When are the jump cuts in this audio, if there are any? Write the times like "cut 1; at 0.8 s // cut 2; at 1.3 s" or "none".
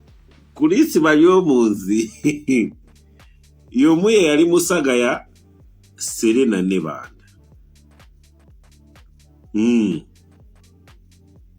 cut 1; at 7.2 s // cut 2; at 9.1 s // cut 3; at 10.1 s

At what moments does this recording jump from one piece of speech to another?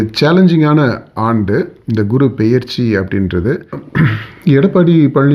cut 1; at 3.7 s

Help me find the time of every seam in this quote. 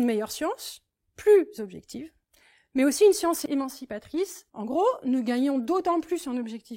cut 1; at 3.4 s // cut 2; at 4.4 s

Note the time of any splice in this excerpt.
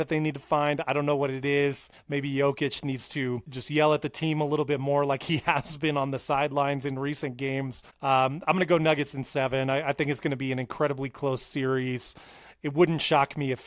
cut 1; at 1.9 s // cut 2; at 3.6 s // cut 3; at 7.8 s

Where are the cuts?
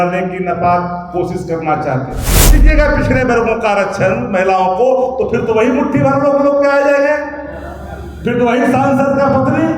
cut 1; at 2.6 s

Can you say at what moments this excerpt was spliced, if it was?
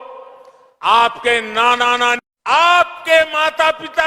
cut 1; at 2.2 s

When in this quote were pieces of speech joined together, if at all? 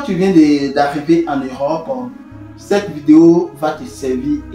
none

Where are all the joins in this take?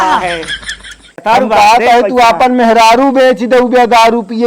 cut 1; at 1.1 s

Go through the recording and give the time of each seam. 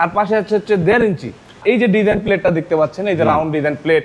cut 1; at 1.6 s

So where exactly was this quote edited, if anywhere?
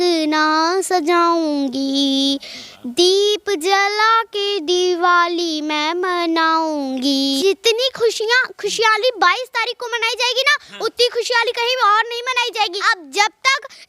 cut 1; at 7.4 s // cut 2; at 12.8 s

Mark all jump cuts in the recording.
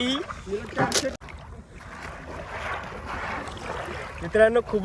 cut 1; at 1.1 s

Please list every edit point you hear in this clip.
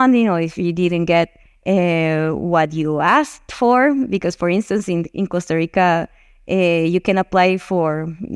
none

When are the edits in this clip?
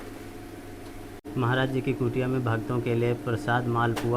cut 1; at 1.2 s

